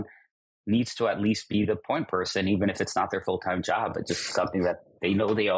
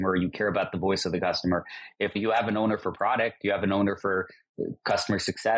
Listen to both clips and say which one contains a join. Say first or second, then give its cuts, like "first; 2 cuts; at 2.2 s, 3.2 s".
second; 1 cut; at 2.1 s